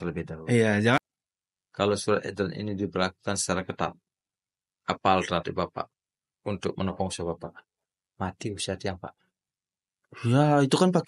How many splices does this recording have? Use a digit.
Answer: 1